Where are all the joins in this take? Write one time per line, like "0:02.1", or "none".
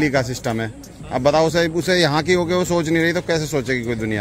none